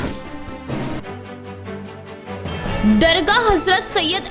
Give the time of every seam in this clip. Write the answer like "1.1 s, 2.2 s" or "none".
none